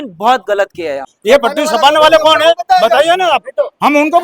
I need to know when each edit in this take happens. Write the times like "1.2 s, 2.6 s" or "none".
1.1 s